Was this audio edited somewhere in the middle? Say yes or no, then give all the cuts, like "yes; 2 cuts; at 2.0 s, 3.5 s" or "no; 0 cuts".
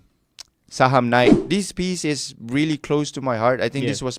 yes; 1 cut; at 1.4 s